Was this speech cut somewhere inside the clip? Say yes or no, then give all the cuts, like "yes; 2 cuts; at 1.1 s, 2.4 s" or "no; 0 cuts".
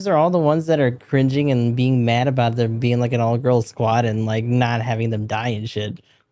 no; 0 cuts